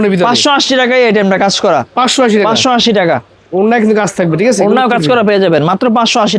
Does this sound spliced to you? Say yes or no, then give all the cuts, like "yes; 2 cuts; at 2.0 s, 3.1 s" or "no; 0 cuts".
no; 0 cuts